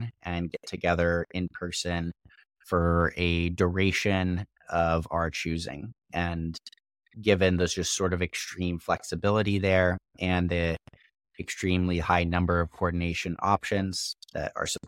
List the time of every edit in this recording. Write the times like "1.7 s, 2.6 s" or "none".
none